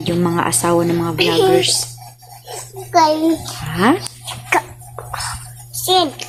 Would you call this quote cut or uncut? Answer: uncut